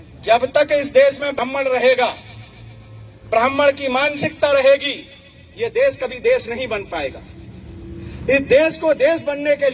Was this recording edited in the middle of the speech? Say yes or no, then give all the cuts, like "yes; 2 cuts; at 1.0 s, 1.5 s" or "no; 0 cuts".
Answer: yes; 1 cut; at 1.4 s